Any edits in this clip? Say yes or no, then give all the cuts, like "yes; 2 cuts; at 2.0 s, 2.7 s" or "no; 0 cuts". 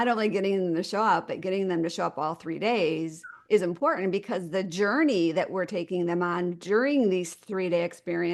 no; 0 cuts